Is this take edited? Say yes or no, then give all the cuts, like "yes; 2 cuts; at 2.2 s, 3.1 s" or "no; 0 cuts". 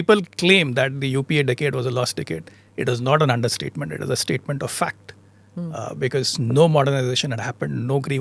no; 0 cuts